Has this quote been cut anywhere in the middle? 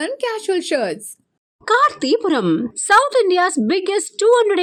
no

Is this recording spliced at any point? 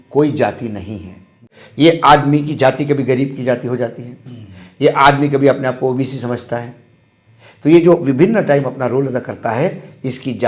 yes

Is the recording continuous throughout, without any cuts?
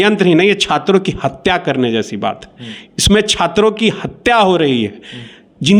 yes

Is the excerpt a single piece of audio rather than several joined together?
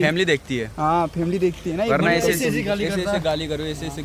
yes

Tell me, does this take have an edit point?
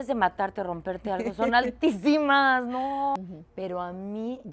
yes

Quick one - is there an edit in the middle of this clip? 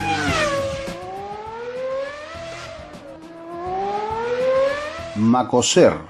yes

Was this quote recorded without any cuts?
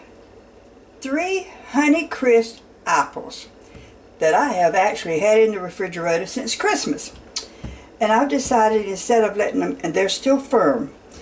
yes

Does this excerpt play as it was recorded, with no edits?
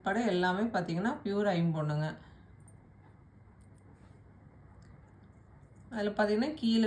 yes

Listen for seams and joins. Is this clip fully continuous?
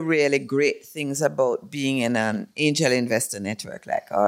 yes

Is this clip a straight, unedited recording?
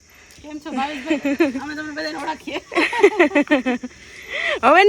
yes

